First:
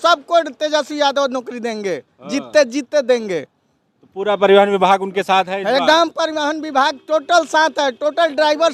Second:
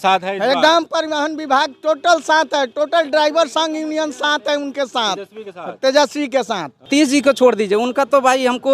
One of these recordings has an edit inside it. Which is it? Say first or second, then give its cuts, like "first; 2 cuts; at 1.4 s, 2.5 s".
second; 1 cut; at 6.9 s